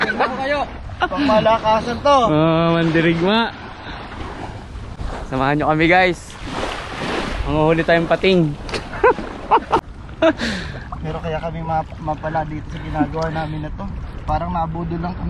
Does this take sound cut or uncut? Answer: cut